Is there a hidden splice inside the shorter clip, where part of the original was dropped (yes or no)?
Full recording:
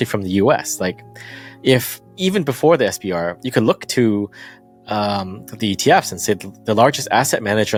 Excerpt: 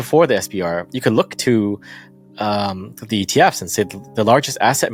no